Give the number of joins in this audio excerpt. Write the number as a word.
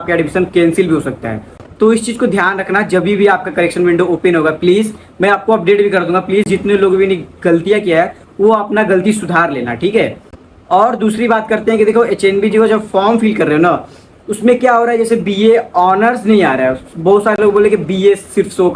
zero